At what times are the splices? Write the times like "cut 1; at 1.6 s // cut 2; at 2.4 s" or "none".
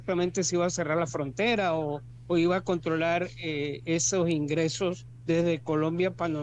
cut 1; at 2.1 s // cut 2; at 5.1 s